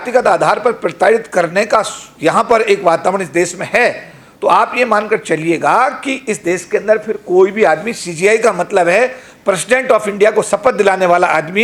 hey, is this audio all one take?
yes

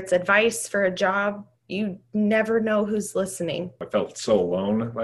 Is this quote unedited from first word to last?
no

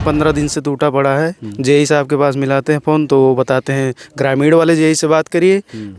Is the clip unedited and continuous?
yes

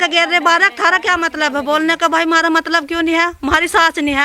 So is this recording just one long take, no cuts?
yes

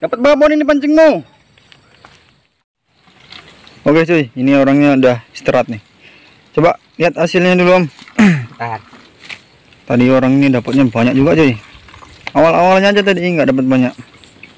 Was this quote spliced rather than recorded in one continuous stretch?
yes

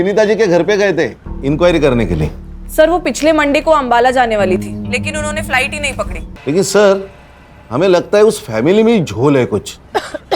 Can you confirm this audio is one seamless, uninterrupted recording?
no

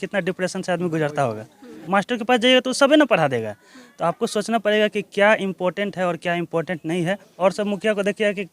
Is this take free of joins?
no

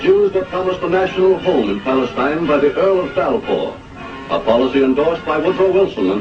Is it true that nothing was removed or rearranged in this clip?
no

